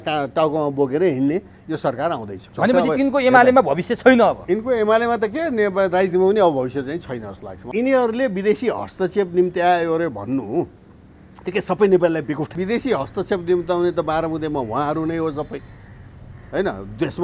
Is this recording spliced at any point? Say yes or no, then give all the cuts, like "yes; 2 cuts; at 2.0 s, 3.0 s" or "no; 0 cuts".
yes; 3 cuts; at 2.4 s, 7.6 s, 12.5 s